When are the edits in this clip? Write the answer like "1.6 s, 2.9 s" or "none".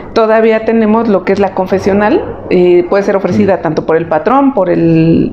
none